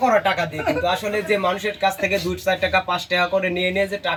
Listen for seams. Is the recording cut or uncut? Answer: uncut